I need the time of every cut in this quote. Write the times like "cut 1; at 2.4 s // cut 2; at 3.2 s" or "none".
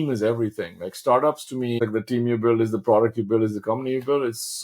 cut 1; at 1.8 s